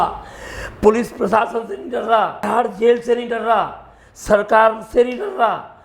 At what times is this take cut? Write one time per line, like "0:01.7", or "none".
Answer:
0:02.4